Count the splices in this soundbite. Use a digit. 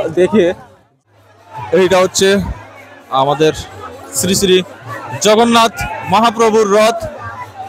1